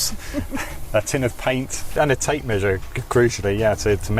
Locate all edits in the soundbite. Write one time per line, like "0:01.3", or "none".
0:02.0